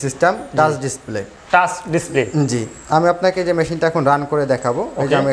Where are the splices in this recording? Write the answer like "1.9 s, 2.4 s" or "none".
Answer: none